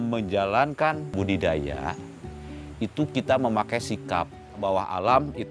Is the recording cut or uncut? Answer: cut